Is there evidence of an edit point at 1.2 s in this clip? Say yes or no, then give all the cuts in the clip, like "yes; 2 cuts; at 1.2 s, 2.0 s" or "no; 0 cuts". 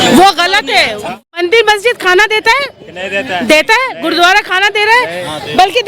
yes; 1 cut; at 1.2 s